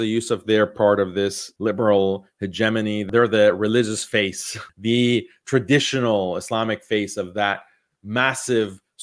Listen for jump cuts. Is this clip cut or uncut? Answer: cut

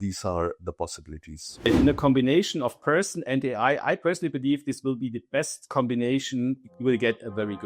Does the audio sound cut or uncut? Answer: cut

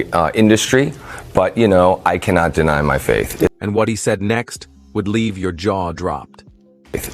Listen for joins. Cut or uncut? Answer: uncut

